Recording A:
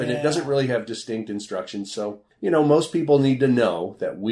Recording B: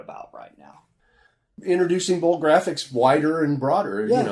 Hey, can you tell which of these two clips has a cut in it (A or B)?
A